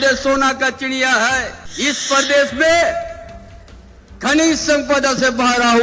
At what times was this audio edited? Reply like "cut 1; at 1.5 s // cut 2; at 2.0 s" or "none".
cut 1; at 1.6 s